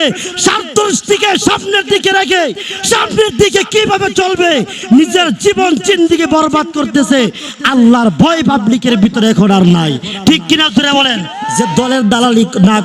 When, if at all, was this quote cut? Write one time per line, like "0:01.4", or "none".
0:11.4